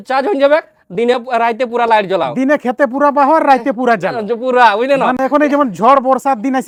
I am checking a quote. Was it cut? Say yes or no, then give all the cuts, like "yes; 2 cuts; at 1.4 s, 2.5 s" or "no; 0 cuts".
no; 0 cuts